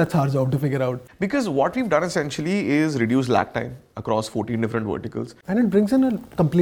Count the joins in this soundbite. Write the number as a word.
two